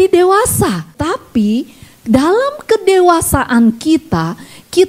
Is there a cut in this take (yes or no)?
yes